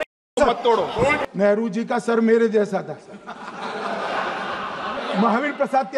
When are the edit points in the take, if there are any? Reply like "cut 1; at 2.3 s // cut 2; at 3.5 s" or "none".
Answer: cut 1; at 1.2 s // cut 2; at 4.9 s

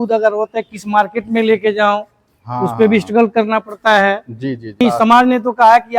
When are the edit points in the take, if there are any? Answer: cut 1; at 4.8 s

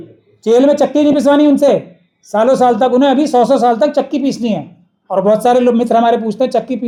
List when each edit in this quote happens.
none

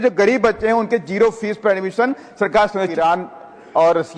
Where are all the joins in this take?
cut 1; at 2.9 s

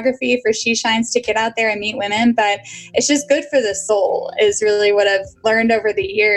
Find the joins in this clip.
cut 1; at 3.8 s // cut 2; at 5.3 s

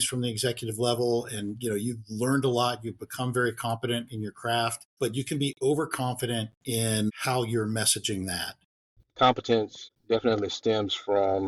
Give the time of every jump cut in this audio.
cut 1; at 8.7 s

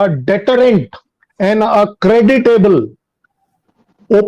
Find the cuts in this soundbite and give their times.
none

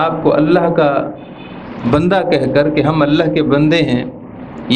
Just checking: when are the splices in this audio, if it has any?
none

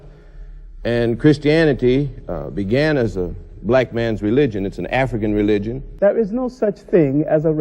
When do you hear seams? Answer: cut 1; at 5.8 s

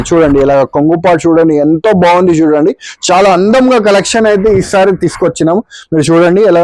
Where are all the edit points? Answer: none

